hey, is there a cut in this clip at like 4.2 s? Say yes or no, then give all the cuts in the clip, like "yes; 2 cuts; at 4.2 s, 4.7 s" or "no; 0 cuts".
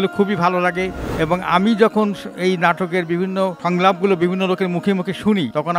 no; 1 cut; at 0.9 s